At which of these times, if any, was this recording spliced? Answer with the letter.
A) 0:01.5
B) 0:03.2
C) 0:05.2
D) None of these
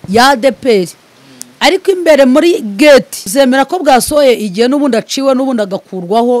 B